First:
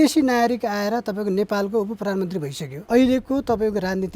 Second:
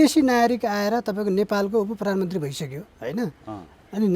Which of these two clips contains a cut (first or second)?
first